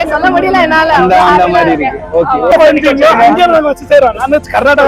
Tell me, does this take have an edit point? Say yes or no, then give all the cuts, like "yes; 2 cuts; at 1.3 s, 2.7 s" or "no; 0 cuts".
no; 0 cuts